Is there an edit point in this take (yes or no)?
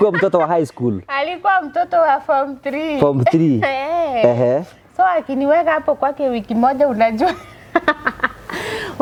no